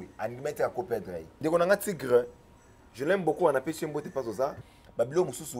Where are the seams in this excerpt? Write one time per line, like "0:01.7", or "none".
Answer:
0:01.3
0:04.6